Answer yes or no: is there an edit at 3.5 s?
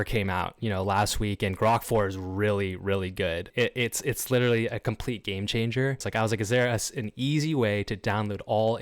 yes